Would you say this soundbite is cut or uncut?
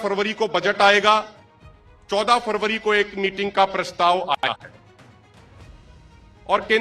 cut